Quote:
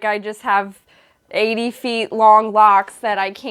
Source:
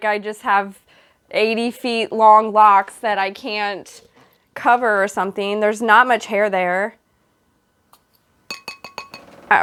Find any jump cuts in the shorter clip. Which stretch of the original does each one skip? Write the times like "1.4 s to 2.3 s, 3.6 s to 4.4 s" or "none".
none